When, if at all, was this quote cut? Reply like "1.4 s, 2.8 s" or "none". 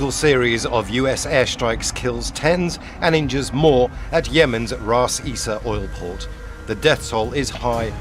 none